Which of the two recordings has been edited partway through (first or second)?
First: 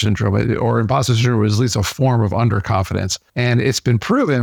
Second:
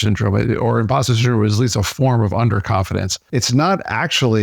second